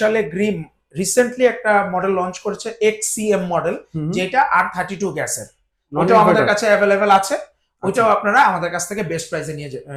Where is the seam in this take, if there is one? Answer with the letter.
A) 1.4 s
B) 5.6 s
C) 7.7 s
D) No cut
D